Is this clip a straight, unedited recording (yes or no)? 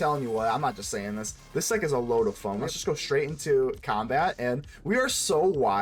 no